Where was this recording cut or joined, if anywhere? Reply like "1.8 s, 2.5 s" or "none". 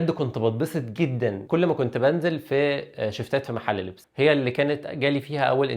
1.4 s, 4.0 s